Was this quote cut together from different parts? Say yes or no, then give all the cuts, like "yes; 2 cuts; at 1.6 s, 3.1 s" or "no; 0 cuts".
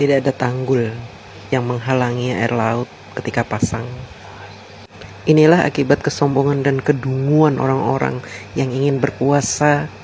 no; 0 cuts